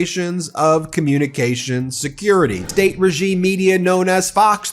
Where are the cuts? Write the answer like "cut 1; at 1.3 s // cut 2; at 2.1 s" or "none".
cut 1; at 2.6 s